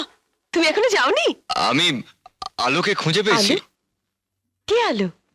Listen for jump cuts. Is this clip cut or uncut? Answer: uncut